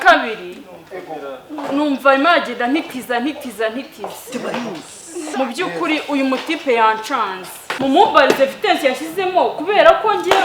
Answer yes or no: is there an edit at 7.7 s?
yes